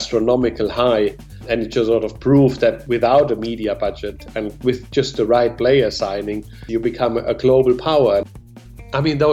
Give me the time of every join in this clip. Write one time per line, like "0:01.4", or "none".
0:01.4
0:02.8
0:06.6
0:08.3